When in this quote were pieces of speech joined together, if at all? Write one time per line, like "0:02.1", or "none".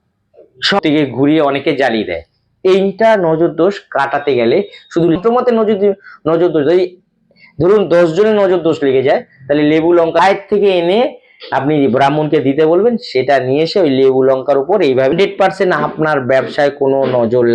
0:00.8
0:05.2
0:10.2
0:15.1